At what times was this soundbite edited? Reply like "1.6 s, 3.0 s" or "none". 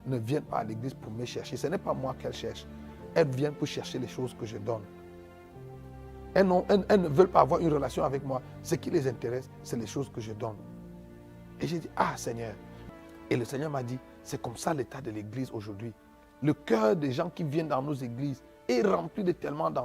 12.7 s